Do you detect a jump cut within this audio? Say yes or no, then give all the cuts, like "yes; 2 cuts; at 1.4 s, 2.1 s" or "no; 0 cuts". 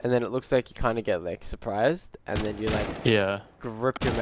no; 0 cuts